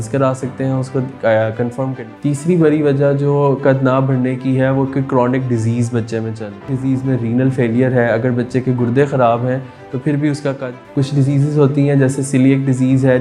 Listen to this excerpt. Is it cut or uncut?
cut